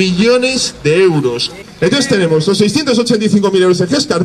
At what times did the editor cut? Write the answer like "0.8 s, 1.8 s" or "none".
1.5 s